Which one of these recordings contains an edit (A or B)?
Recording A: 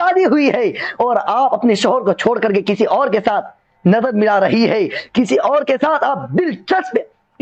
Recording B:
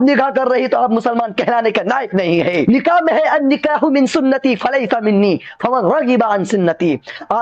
B